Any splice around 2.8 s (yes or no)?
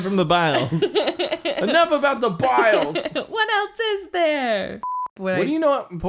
no